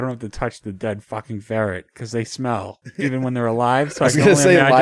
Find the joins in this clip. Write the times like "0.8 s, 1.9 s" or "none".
2.8 s